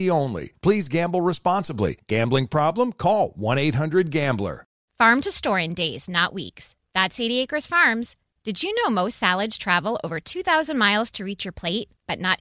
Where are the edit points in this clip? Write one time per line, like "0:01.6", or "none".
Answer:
0:04.8